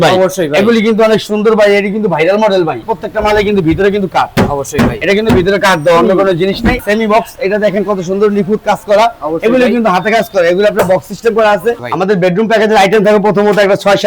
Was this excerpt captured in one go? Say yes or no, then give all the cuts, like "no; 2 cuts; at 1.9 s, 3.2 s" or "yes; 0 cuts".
no; 3 cuts; at 2.9 s, 6.8 s, 11.8 s